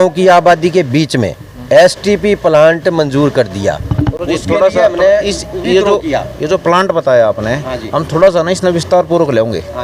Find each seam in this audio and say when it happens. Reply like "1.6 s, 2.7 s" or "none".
none